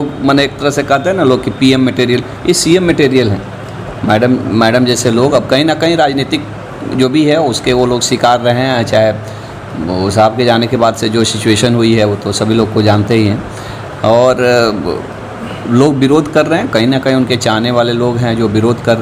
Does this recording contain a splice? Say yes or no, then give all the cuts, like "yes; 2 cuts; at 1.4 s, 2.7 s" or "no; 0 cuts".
no; 0 cuts